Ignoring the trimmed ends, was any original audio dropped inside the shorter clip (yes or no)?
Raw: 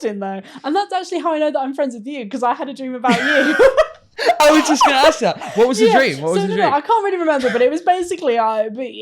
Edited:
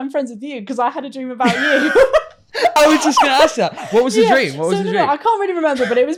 no